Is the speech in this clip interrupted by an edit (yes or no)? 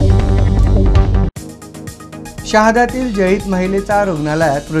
yes